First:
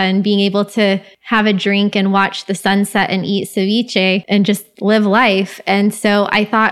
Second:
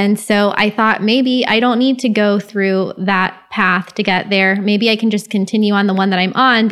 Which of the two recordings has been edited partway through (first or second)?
first